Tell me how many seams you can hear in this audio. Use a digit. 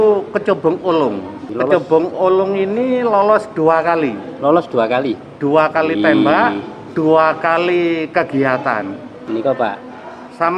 2